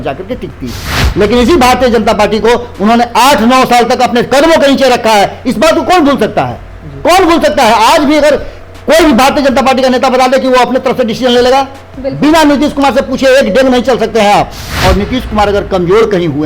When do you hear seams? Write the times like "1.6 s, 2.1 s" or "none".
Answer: 1.1 s, 14.6 s